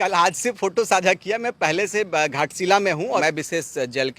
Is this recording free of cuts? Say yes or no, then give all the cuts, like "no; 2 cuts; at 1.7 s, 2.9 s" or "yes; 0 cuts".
no; 1 cut; at 3.2 s